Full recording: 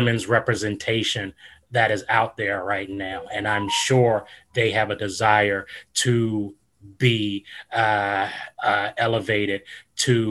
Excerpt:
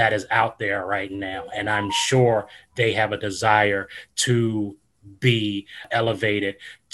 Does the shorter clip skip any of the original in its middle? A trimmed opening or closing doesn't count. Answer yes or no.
yes